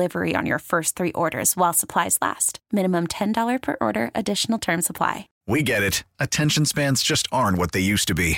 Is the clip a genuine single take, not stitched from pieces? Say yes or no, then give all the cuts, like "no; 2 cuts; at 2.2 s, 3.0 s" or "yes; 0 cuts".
no; 1 cut; at 5.3 s